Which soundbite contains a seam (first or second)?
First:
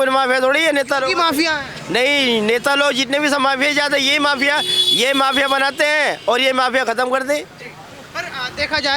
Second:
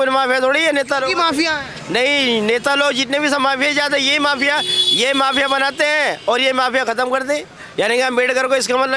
second